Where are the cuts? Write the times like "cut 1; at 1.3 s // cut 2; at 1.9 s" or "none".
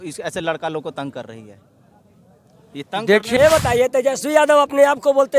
cut 1; at 3.4 s